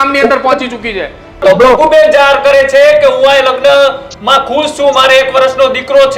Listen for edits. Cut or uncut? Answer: cut